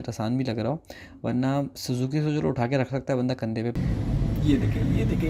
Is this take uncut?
no; 1 cut; at 3.8 s

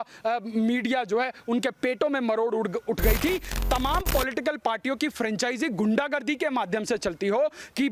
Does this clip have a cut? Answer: yes; 1 cut; at 3.5 s

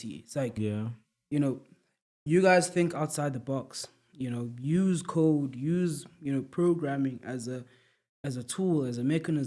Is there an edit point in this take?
no; 0 cuts

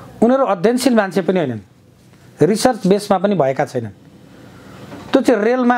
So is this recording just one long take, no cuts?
yes; 0 cuts

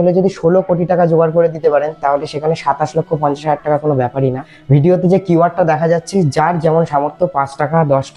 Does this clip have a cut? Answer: yes; 1 cut; at 4.6 s

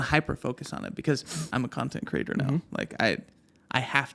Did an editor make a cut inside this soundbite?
yes; 1 cut; at 1.4 s

